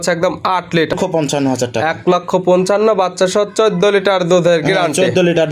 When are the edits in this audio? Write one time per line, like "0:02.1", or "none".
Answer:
0:00.9